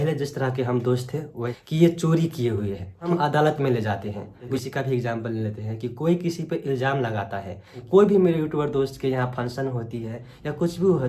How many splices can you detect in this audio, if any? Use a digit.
4